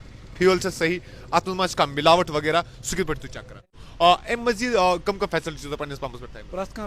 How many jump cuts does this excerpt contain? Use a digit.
1